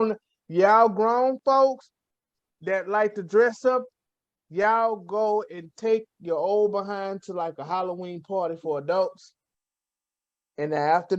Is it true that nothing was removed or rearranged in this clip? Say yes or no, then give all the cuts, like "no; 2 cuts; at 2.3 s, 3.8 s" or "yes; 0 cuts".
yes; 0 cuts